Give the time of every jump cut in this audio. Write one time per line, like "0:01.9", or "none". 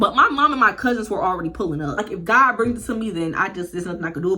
0:02.0